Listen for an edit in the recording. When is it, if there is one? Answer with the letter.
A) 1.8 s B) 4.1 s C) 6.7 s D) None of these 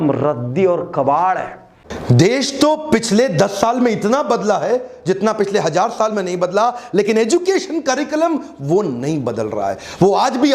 A